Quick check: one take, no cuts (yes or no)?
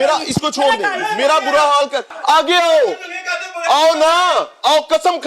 no